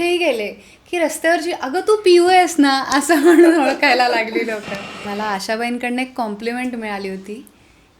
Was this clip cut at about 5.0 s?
yes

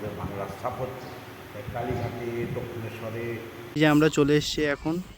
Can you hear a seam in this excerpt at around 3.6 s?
yes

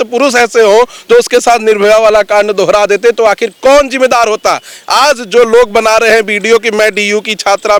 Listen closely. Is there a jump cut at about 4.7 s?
no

